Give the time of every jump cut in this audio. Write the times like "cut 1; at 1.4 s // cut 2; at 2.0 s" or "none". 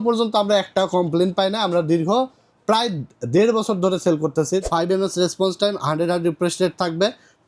cut 1; at 4.6 s